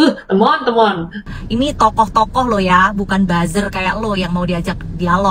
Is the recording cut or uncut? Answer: cut